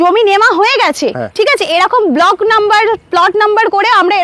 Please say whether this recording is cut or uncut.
uncut